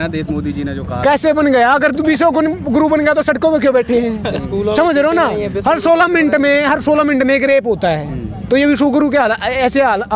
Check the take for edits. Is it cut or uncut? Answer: uncut